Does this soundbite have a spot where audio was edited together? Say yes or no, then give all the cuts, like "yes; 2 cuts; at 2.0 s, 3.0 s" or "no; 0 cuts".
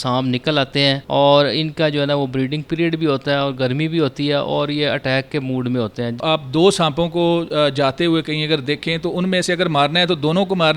yes; 2 cuts; at 1.0 s, 6.2 s